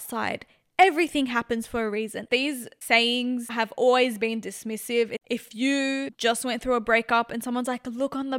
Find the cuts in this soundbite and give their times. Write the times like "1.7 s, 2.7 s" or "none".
2.2 s, 5.2 s, 6.1 s